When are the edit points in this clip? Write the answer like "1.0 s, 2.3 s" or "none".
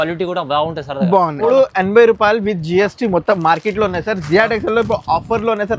1.4 s